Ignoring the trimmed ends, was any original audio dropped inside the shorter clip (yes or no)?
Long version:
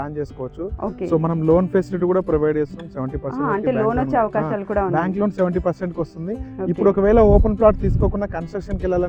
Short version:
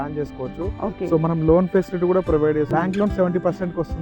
yes